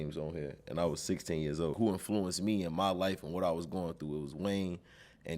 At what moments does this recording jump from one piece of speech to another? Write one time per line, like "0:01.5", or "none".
0:01.7